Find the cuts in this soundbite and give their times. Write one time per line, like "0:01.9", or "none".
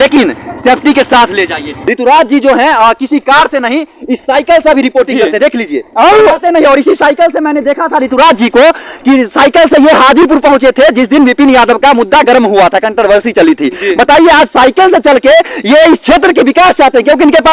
0:01.7